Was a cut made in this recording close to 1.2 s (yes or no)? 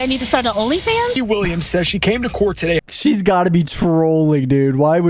yes